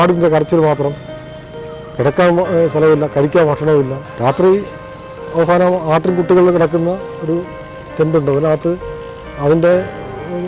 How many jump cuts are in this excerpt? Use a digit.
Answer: 1